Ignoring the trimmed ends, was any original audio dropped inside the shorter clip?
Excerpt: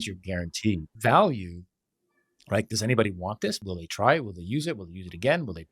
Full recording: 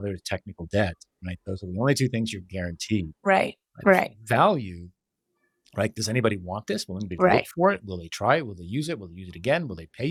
yes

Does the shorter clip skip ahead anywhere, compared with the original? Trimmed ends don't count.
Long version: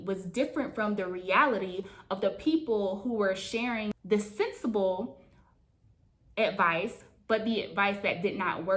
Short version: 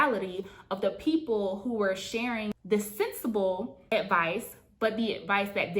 yes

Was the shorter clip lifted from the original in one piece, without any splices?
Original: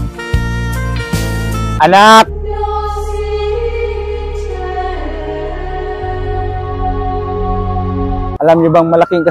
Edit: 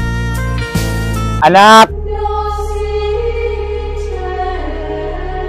yes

